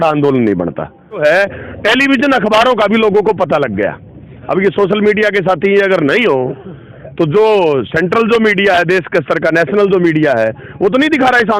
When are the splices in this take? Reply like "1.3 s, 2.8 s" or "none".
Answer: 1.2 s